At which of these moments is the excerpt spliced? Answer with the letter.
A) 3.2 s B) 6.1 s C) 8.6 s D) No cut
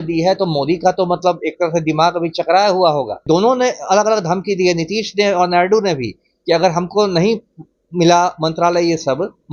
A